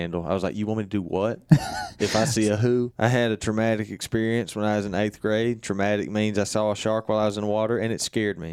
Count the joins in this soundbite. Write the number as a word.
one